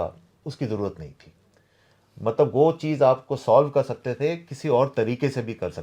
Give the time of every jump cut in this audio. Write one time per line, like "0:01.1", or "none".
none